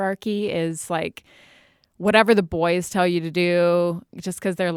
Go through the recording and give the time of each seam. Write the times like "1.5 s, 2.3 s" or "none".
none